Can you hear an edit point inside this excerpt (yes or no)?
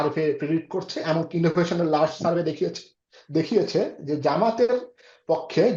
no